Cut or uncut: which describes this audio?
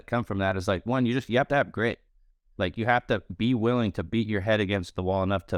uncut